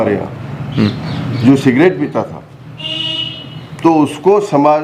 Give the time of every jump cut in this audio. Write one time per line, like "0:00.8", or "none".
none